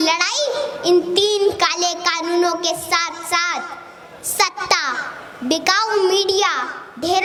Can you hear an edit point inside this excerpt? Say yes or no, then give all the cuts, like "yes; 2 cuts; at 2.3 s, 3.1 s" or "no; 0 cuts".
no; 0 cuts